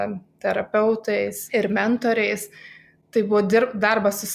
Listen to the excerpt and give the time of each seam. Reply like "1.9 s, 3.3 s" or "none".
none